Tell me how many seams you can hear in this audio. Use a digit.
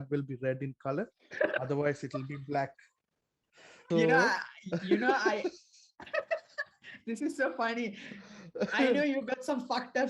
1